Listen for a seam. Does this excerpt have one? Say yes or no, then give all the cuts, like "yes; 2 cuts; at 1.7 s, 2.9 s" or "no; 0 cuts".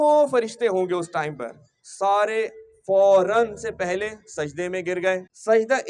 no; 0 cuts